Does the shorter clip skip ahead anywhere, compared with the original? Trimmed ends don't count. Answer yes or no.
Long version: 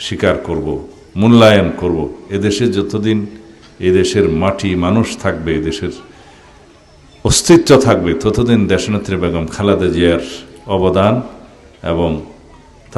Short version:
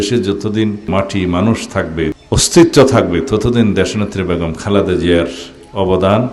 yes